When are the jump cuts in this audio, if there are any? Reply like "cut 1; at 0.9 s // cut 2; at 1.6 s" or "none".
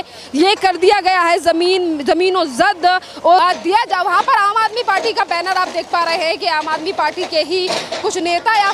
cut 1; at 3.4 s